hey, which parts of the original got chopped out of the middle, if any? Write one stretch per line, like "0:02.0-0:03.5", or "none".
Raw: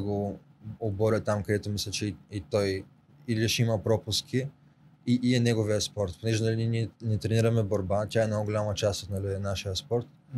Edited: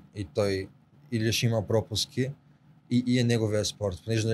none

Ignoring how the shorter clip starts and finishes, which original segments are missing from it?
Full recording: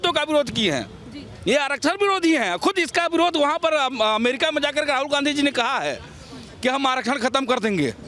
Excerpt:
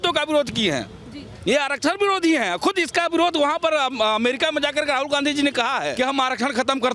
0:05.9-0:06.6

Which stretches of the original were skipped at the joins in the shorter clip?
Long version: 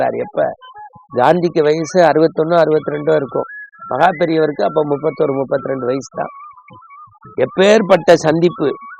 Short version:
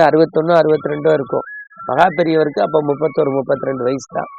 none

